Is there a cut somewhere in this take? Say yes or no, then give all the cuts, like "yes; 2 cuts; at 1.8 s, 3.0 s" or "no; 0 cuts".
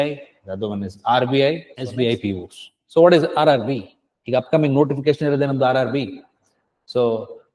yes; 1 cut; at 1.8 s